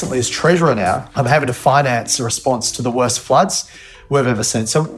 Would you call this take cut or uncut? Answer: cut